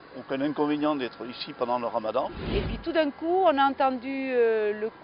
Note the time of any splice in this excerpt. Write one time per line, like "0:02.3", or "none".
0:02.4